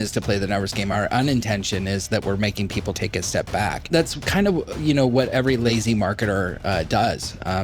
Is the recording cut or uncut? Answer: cut